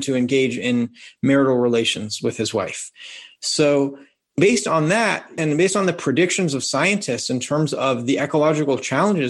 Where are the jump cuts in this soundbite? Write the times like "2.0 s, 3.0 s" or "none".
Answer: 4.3 s, 5.4 s